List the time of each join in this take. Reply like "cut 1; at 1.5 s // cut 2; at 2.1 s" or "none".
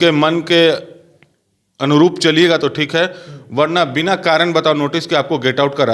none